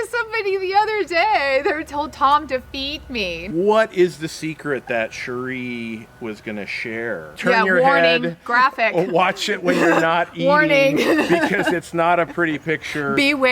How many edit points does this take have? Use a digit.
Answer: 2